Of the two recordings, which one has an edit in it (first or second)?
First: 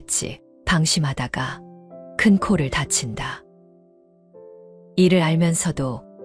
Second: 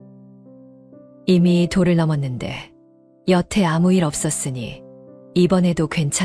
first